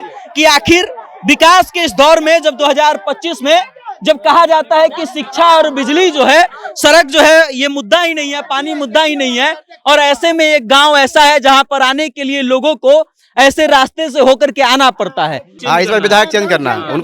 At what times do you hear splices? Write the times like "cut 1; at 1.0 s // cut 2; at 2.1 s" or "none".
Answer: cut 1; at 15.5 s